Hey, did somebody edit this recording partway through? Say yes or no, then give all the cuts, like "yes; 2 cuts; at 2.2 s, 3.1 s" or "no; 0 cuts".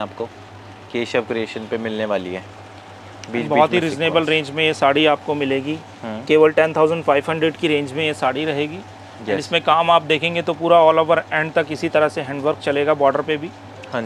no; 0 cuts